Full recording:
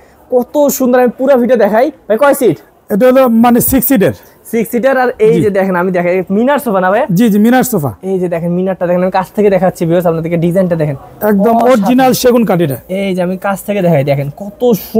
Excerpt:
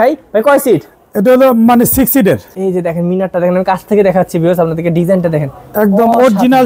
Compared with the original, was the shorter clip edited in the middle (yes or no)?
yes